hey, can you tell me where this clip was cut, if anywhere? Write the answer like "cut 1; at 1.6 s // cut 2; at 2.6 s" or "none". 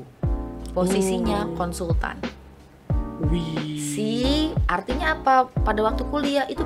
none